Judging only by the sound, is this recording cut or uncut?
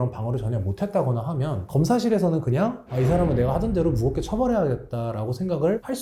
uncut